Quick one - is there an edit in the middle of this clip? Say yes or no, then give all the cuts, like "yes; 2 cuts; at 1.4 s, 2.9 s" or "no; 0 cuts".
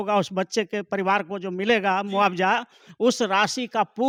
no; 0 cuts